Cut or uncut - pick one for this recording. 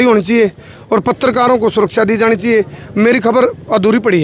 uncut